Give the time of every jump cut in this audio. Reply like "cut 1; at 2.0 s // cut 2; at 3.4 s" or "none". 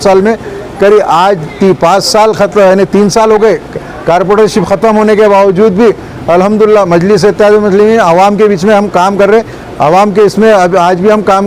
none

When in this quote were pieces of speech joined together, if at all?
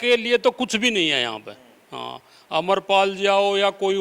none

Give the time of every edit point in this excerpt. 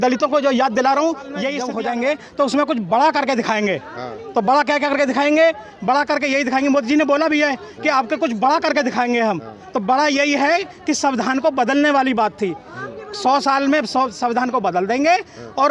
cut 1; at 1.6 s

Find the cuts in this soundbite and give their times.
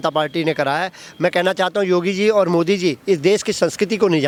none

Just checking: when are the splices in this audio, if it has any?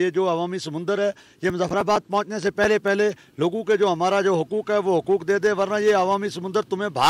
none

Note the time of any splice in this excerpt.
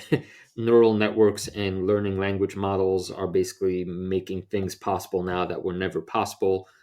none

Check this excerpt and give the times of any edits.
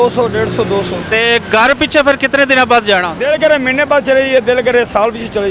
cut 1; at 1.0 s // cut 2; at 3.1 s

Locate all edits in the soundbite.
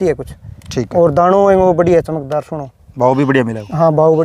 none

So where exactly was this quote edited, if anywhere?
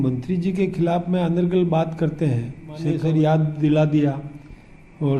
cut 1; at 3.0 s

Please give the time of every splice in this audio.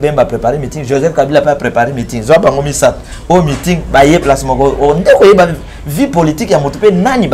none

